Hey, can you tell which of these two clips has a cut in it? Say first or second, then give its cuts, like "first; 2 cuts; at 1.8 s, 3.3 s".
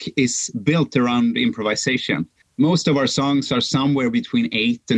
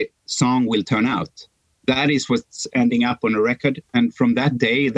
first; 1 cut; at 2.4 s